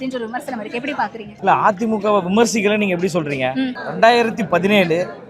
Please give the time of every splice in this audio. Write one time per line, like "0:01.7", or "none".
0:01.3
0:03.8